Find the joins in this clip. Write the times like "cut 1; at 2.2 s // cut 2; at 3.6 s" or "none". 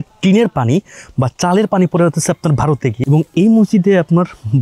cut 1; at 3.0 s